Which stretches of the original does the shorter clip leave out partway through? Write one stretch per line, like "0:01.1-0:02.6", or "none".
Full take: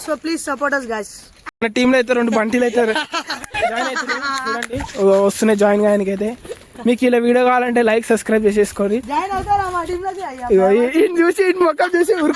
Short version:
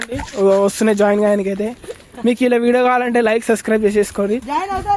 none

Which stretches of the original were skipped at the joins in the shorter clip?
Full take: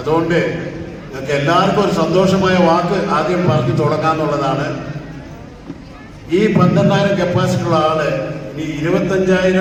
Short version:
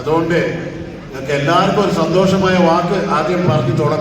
none

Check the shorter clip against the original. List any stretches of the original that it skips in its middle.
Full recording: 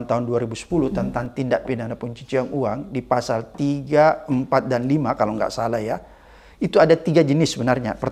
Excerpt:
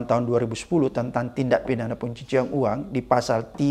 none

